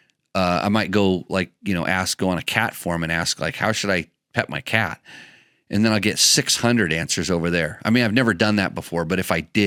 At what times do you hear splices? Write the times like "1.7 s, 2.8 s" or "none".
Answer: none